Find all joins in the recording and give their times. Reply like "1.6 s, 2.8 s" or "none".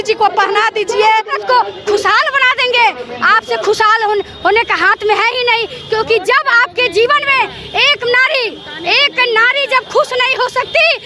1.3 s